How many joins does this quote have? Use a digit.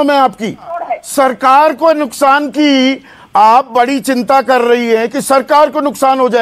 1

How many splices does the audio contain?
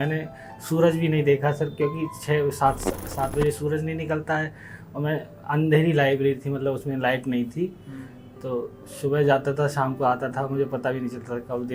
0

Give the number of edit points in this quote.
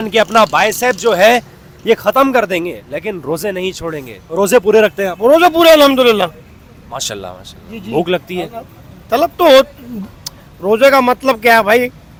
0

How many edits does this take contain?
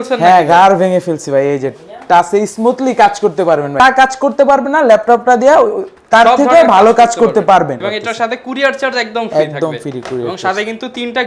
2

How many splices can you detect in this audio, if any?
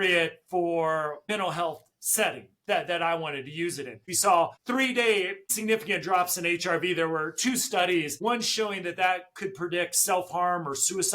2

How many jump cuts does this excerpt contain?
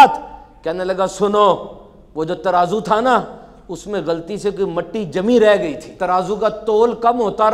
1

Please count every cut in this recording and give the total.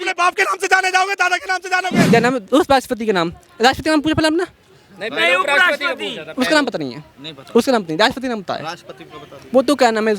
1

